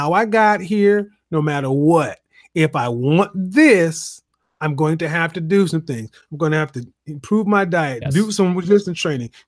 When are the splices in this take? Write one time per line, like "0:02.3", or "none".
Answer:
0:08.0